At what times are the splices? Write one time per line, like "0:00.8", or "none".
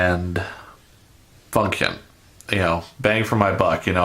0:03.1